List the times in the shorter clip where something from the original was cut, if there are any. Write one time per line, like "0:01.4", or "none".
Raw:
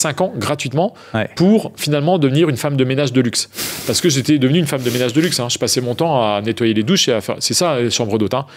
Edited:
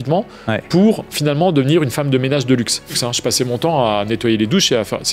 0:03.0